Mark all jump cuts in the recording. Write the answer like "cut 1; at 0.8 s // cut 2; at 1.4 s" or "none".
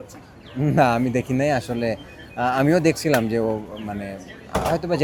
none

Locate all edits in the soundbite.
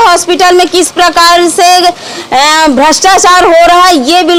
none

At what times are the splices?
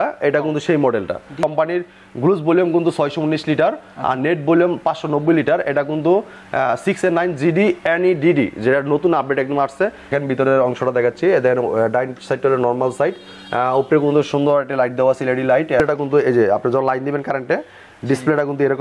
cut 1; at 1.4 s // cut 2; at 10.1 s // cut 3; at 15.8 s

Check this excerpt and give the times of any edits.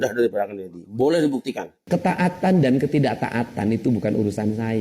cut 1; at 1.8 s

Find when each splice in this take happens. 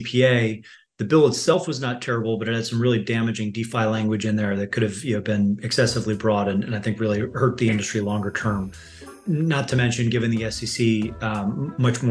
cut 1; at 9.2 s

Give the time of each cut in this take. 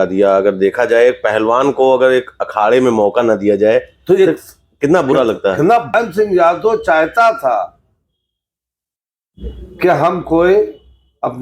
cut 1; at 5.9 s

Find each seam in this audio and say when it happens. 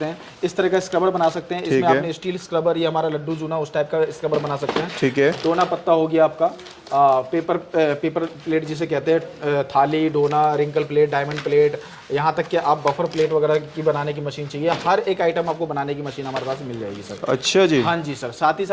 none

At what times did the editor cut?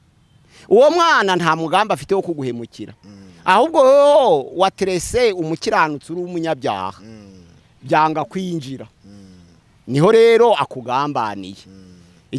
none

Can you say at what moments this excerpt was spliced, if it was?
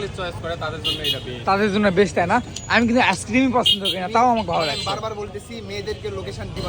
none

